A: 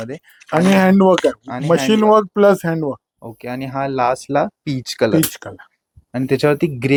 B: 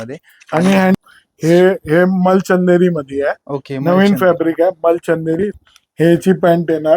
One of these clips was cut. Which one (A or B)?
B